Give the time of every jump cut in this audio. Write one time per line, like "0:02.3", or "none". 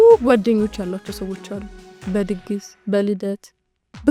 none